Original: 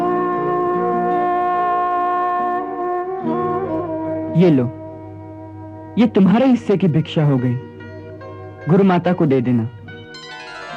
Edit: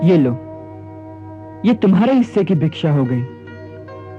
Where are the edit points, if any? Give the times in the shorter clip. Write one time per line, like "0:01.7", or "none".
none